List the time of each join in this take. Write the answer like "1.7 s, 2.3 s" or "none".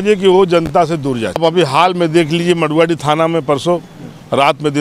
1.4 s